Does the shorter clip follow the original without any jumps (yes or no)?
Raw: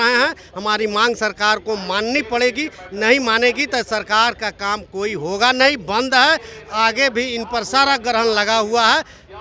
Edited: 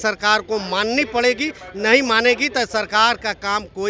yes